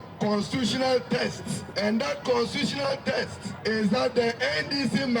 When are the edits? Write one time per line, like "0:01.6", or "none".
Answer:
0:01.6
0:03.4